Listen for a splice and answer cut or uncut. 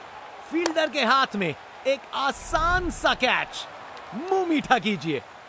uncut